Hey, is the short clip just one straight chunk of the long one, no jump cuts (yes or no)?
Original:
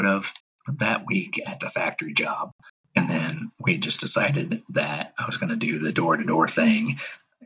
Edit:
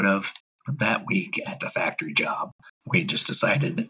no